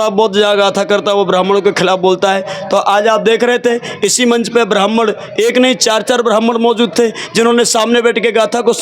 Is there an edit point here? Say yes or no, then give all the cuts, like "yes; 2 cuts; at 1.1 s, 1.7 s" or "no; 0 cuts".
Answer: no; 0 cuts